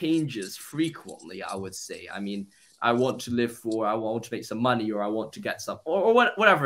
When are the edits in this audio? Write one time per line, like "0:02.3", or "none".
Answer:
none